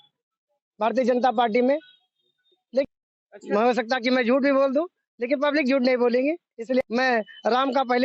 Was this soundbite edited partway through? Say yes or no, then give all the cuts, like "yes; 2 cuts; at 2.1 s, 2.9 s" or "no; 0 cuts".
yes; 2 cuts; at 2.8 s, 6.8 s